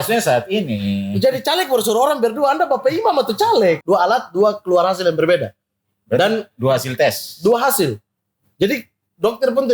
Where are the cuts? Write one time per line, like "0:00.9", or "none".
0:03.8